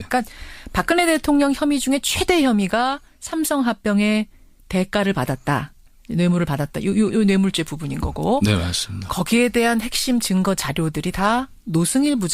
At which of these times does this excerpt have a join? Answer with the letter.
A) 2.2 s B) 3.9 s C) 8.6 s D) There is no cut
A